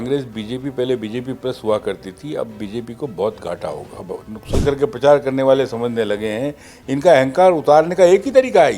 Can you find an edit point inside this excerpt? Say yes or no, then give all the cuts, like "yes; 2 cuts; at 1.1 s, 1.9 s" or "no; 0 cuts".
yes; 1 cut; at 4.5 s